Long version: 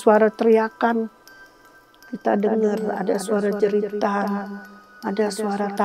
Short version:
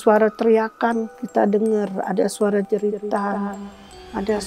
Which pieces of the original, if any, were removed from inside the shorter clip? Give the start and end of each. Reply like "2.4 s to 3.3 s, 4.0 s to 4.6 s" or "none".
1.2 s to 2.1 s